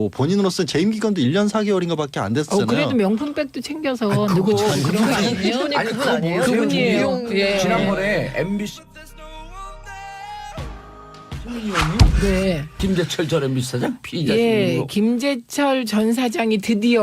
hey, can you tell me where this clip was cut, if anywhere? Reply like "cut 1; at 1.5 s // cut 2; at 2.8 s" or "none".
cut 1; at 8.5 s